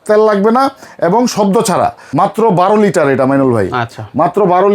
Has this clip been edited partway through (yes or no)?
yes